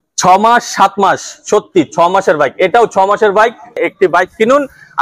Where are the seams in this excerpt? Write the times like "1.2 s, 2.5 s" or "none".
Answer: 3.8 s